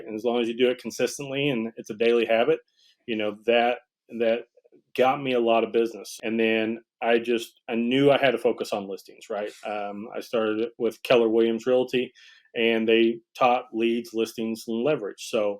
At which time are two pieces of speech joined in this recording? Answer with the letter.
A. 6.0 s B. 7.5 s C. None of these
A